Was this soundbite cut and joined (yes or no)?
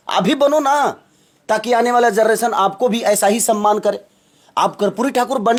no